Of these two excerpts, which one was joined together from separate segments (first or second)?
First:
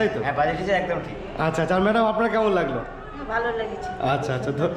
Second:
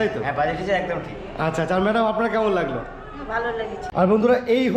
second